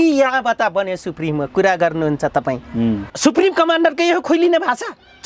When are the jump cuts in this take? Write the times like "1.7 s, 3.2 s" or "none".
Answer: 3.1 s